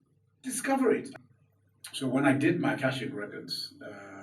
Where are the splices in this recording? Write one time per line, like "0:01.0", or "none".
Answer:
0:01.1